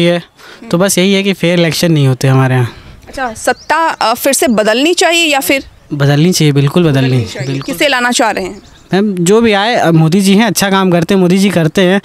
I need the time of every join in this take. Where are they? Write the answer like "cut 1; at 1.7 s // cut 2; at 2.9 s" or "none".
none